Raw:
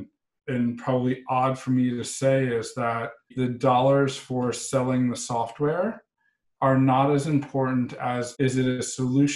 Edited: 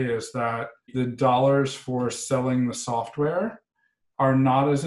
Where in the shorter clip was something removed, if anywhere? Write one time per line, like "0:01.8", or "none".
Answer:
none